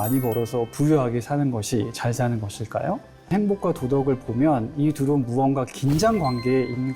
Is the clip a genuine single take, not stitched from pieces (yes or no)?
no